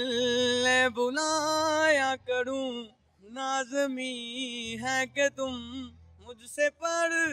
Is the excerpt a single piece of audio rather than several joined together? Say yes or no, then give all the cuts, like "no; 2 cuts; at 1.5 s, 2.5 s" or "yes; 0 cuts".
yes; 0 cuts